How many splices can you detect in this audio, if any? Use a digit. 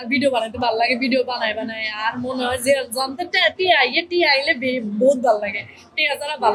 0